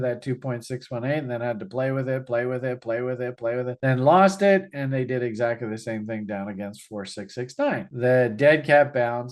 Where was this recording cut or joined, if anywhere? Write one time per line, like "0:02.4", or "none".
0:07.9

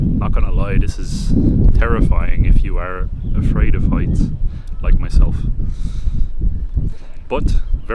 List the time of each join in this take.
none

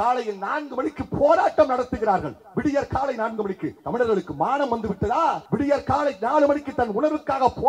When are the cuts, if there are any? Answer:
0:03.7
0:05.4

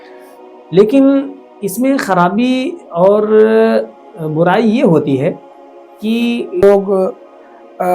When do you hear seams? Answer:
0:06.6

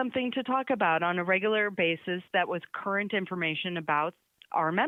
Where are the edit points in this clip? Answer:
none

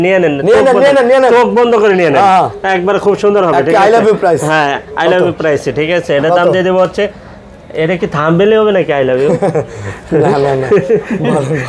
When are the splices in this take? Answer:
none

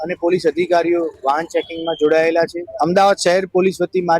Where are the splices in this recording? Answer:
0:02.6

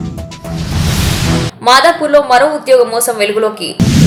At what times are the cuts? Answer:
none

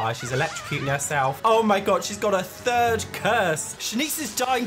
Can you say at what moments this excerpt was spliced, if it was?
0:03.7

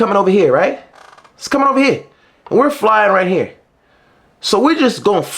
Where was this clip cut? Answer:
none

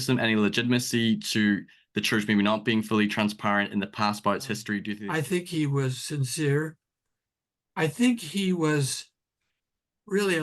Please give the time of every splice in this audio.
0:04.9

